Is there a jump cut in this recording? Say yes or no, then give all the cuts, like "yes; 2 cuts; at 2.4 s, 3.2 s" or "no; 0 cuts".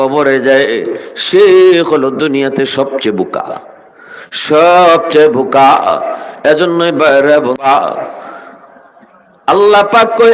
yes; 1 cut; at 7.6 s